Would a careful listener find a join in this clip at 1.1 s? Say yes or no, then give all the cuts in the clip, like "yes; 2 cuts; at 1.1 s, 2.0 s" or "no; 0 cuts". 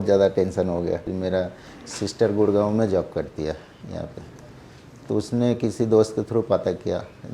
yes; 1 cut; at 1.1 s